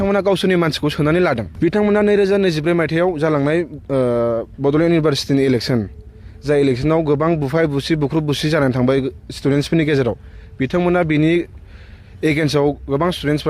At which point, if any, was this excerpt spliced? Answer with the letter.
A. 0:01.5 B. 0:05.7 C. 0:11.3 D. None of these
A